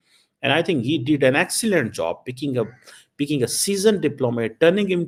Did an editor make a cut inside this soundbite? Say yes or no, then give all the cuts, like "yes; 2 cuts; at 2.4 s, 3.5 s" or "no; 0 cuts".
no; 0 cuts